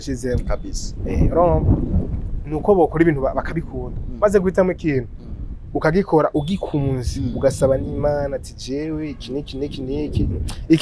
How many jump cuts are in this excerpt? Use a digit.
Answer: 0